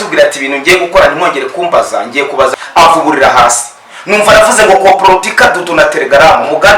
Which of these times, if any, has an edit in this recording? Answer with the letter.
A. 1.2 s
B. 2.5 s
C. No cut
B